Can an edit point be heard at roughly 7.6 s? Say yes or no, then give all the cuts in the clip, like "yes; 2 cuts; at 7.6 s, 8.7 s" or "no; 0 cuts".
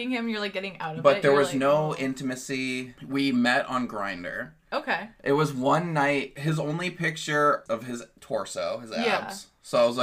yes; 4 cuts; at 2.9 s, 5.1 s, 6.3 s, 7.6 s